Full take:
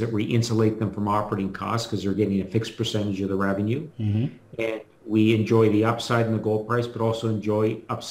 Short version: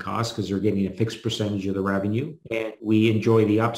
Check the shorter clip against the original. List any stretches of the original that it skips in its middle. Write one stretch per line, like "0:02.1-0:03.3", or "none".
0:04.1-0:04.8